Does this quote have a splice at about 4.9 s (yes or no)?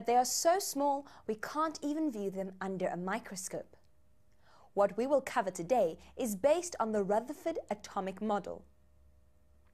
no